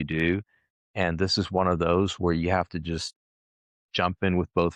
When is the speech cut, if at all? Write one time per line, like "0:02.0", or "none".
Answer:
none